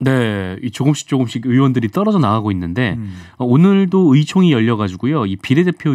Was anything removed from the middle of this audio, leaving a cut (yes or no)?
no